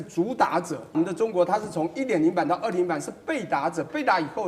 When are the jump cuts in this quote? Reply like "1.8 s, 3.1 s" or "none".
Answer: 1.0 s